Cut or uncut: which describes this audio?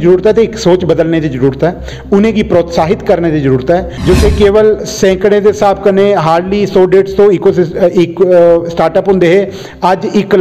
cut